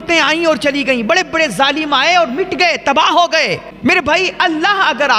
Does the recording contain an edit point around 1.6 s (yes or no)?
no